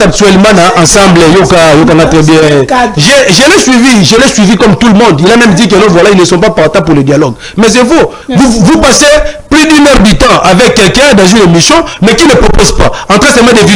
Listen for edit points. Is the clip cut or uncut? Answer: cut